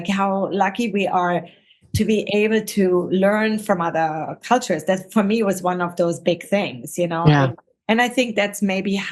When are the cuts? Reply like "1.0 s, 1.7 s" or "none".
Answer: 7.7 s